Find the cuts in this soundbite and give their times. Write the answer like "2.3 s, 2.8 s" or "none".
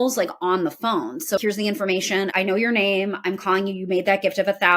1.4 s